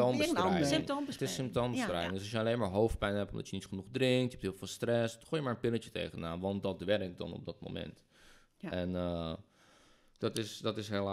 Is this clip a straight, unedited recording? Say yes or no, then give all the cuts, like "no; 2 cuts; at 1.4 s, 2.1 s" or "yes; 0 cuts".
yes; 0 cuts